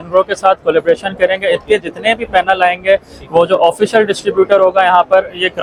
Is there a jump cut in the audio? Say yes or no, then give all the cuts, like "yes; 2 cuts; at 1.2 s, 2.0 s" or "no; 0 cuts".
no; 0 cuts